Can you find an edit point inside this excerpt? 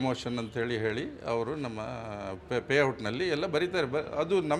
no; 0 cuts

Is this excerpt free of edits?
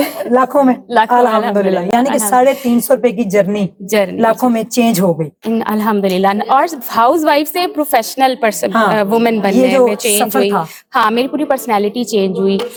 yes; 0 cuts

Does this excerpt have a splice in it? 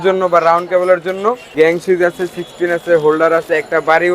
yes; 1 cut; at 1.5 s

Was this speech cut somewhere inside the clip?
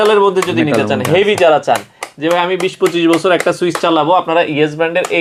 no; 0 cuts

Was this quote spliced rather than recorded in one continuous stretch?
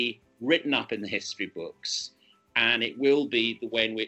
no; 0 cuts

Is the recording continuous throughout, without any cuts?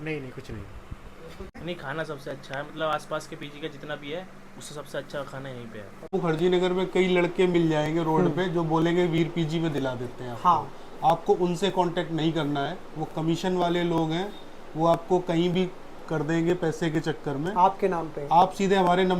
no; 2 cuts; at 1.5 s, 6.1 s

